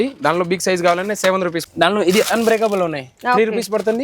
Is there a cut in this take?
yes; 1 cut; at 1.6 s

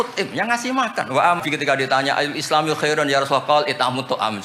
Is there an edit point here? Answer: yes; 1 cut; at 1.4 s

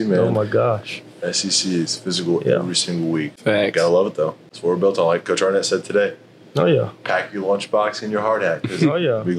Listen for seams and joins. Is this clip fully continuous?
no; 2 cuts; at 3.3 s, 4.5 s

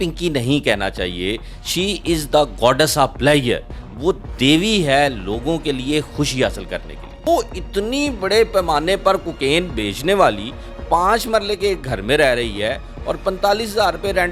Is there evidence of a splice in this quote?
yes; 1 cut; at 7.2 s

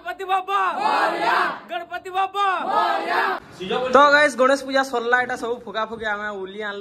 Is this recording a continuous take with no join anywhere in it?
no; 1 cut; at 3.5 s

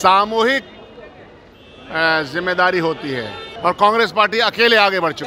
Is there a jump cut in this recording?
yes; 1 cut; at 3.4 s

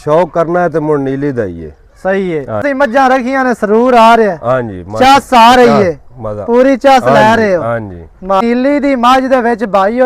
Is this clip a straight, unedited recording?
no; 2 cuts; at 2.6 s, 8.4 s

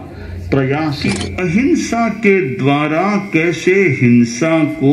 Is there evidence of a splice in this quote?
yes; 1 cut; at 1.3 s

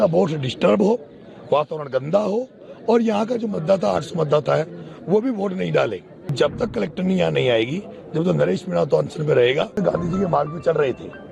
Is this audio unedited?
no; 2 cuts; at 6.3 s, 9.8 s

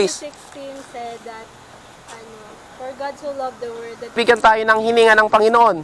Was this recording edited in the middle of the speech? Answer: yes; 1 cut; at 4.2 s

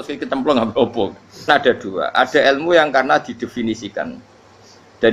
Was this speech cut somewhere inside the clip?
yes; 1 cut; at 1.5 s

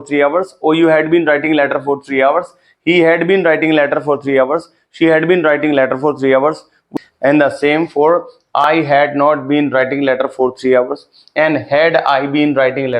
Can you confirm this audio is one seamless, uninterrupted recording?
no; 1 cut; at 6.9 s

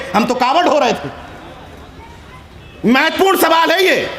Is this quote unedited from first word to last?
yes; 0 cuts

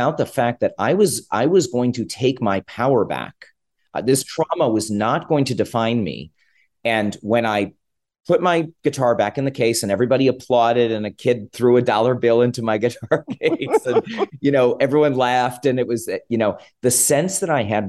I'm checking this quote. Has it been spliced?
no; 0 cuts

